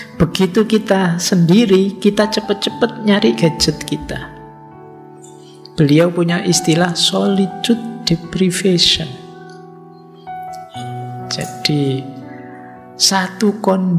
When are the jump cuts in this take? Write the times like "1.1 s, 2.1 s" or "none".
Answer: 9.1 s, 11.0 s